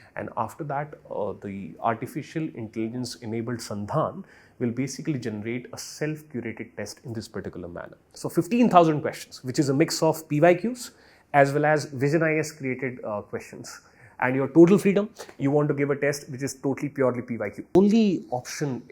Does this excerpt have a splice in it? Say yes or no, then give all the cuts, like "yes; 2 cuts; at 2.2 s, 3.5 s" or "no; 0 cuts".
yes; 2 cuts; at 8.1 s, 17.8 s